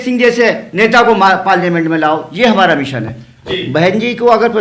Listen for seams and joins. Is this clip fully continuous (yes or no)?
no